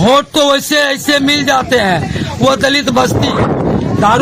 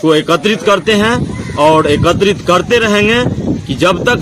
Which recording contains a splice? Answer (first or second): second